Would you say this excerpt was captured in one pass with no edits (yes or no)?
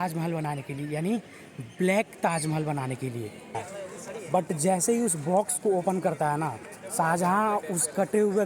no